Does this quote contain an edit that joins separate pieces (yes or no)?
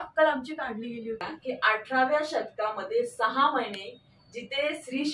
yes